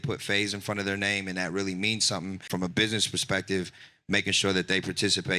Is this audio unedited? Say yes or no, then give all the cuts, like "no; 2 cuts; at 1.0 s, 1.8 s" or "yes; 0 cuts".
no; 1 cut; at 2.5 s